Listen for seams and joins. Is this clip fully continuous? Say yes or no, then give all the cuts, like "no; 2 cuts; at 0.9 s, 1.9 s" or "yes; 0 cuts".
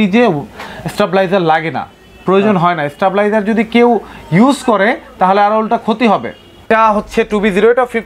no; 1 cut; at 6.5 s